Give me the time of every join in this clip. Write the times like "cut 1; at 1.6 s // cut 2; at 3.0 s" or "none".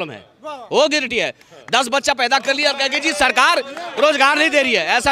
none